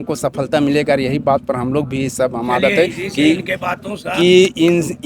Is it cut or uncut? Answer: uncut